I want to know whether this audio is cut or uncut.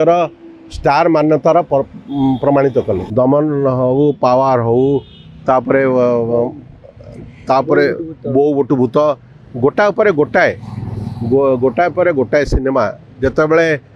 cut